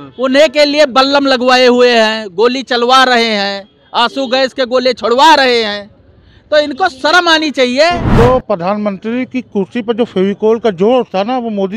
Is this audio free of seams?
no; 1 cut; at 8.0 s

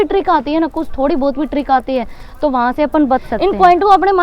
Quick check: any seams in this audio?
yes; 1 cut; at 3.3 s

